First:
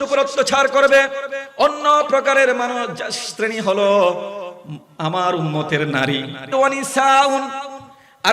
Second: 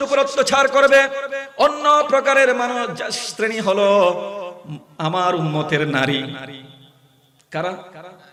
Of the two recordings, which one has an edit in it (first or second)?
first